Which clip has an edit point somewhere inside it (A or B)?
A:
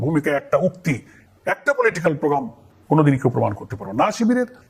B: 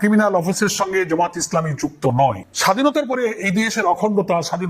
B